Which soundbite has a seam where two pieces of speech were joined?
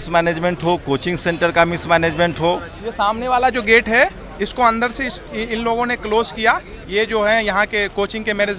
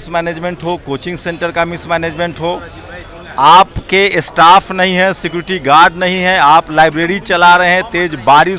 first; 1 cut; at 2.8 s

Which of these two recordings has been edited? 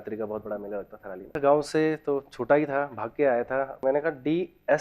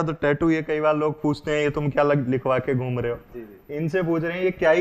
first; 2 cuts; at 1.3 s, 3.8 s

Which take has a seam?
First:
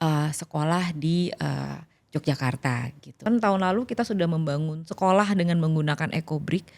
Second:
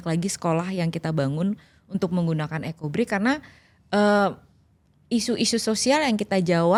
first; 1 cut; at 3.2 s

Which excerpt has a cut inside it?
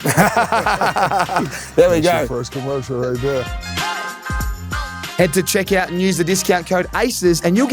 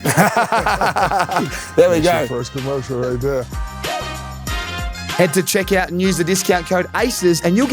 second; 2 cuts; at 3.5 s, 5.1 s

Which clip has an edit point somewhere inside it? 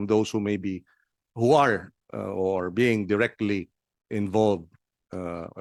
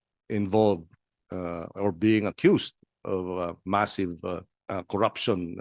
second; 1 cut; at 4.5 s

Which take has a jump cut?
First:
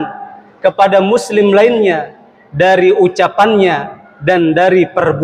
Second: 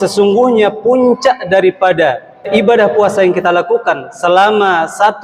second; 1 cut; at 2.5 s

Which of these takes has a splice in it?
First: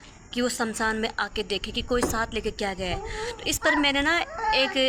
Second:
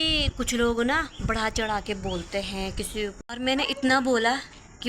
second; 1 cut; at 3.2 s

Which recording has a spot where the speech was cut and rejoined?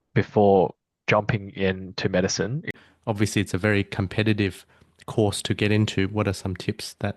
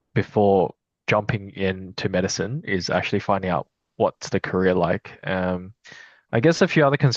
first; 1 cut; at 2.7 s

